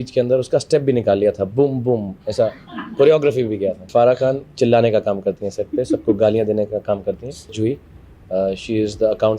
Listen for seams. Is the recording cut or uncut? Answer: cut